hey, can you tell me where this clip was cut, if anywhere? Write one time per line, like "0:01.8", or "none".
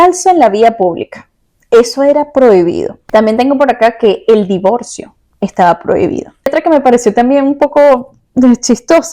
0:02.9
0:06.5